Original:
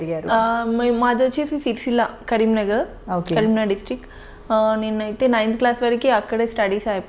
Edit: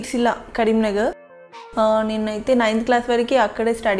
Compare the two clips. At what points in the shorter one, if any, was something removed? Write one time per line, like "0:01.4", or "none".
0:01.3